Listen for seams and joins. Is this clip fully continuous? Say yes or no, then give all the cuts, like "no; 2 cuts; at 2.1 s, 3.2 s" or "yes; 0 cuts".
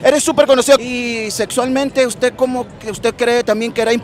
no; 1 cut; at 0.9 s